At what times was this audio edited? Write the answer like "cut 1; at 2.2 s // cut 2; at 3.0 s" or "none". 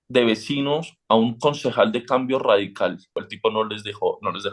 cut 1; at 3.3 s